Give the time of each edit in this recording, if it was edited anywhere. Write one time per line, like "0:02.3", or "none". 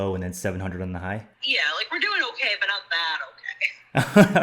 0:01.4